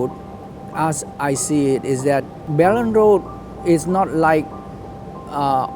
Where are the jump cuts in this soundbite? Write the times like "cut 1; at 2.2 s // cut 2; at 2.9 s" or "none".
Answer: cut 1; at 2.4 s